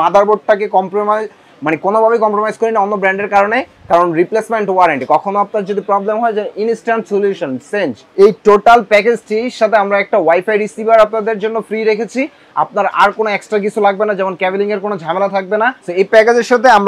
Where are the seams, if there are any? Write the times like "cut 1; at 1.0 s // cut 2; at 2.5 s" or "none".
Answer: cut 1; at 8.0 s // cut 2; at 15.8 s